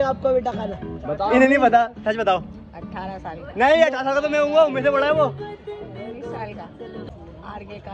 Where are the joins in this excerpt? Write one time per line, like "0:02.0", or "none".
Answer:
0:07.0